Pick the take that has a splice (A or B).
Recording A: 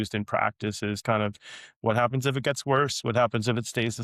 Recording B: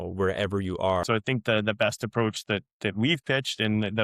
B